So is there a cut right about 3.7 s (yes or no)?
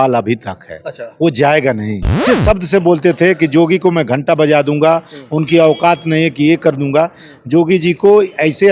no